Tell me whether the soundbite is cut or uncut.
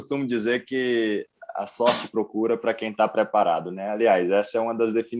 uncut